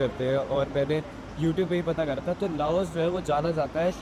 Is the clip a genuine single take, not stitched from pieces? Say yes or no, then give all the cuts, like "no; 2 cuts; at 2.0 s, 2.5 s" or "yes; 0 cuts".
yes; 0 cuts